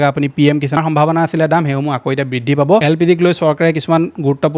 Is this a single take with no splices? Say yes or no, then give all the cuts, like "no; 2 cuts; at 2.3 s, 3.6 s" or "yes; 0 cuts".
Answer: no; 2 cuts; at 0.8 s, 2.8 s